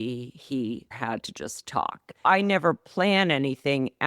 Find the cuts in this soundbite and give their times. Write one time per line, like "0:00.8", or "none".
0:00.9
0:02.2